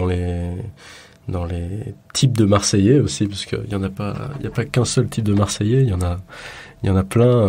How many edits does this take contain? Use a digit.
0